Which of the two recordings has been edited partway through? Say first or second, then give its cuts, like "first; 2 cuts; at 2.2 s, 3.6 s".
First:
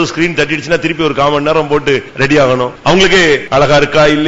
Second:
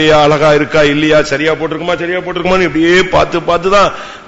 first; 2 cuts; at 2.1 s, 3.1 s